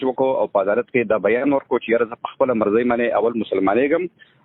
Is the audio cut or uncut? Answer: uncut